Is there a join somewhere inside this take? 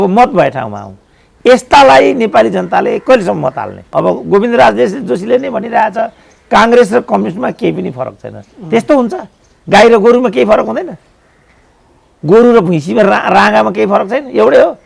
yes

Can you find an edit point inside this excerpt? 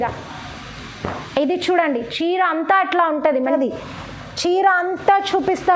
yes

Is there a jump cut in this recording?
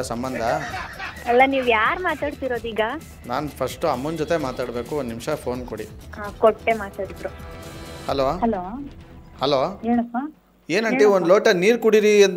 no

